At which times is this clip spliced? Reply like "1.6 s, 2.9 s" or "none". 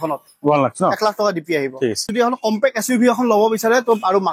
2.1 s

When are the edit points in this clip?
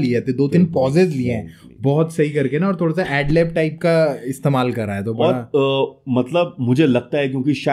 none

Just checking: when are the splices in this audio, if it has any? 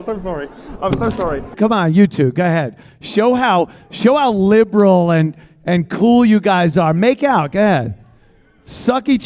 1.5 s

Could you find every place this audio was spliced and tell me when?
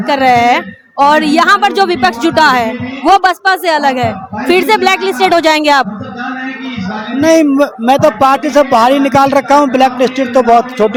none

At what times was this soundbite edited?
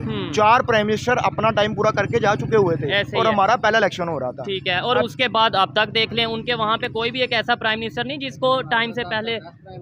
none

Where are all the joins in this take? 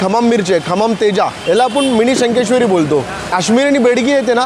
1.4 s, 3.3 s

